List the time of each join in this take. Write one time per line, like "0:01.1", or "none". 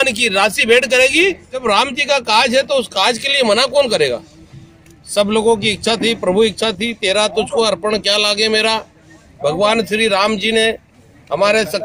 0:01.6